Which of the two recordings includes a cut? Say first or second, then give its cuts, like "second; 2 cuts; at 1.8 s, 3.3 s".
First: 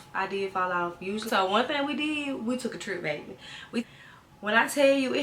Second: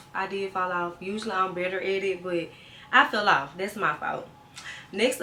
first; 2 cuts; at 1.2 s, 3.8 s